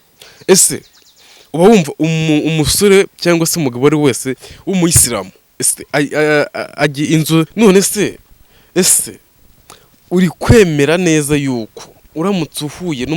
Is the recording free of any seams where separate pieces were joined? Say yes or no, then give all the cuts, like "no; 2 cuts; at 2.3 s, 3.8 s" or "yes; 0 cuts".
no; 1 cut; at 7.5 s